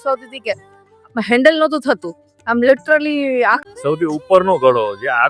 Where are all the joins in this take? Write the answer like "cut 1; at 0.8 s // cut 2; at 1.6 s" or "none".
cut 1; at 3.6 s